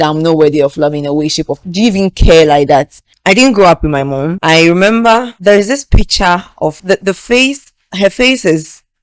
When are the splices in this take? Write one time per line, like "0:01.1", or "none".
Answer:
0:01.5
0:03.1
0:04.3
0:05.3
0:06.8